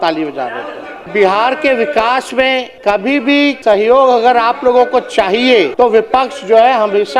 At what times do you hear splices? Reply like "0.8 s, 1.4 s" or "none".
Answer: 1.1 s, 2.7 s, 3.6 s, 5.7 s